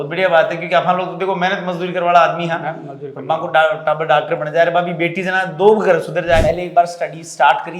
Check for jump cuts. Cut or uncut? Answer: cut